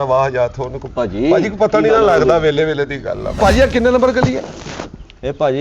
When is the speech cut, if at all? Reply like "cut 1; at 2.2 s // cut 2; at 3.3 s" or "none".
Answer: cut 1; at 3.3 s